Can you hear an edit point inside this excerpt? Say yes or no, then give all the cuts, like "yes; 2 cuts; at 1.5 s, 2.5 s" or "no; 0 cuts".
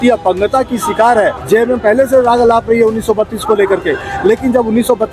yes; 1 cut; at 1.4 s